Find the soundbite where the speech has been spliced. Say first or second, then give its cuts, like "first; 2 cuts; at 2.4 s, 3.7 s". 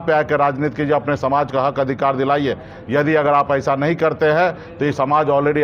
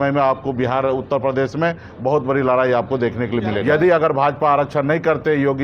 second; 1 cut; at 3.6 s